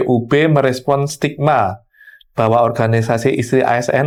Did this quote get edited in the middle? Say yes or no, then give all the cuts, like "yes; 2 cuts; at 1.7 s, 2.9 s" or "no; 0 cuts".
no; 0 cuts